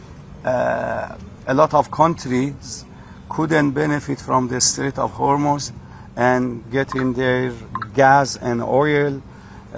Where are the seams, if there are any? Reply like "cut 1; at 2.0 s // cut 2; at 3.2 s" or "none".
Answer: none